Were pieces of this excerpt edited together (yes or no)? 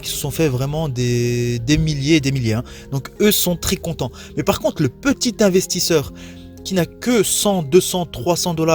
no